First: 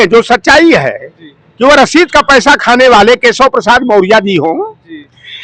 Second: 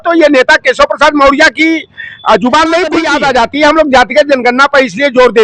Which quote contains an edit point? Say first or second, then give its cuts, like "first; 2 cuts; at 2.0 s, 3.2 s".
second; 1 cut; at 3.1 s